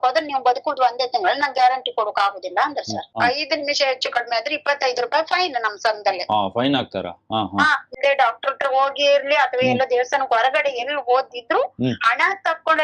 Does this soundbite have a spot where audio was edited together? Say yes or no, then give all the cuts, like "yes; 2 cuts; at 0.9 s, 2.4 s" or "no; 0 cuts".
yes; 2 cuts; at 3.1 s, 7.9 s